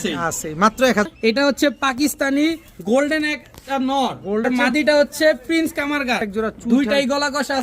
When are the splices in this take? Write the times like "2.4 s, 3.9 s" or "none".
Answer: 1.1 s, 4.4 s, 6.3 s